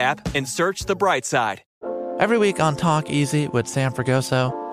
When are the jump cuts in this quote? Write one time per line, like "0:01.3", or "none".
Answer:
0:01.6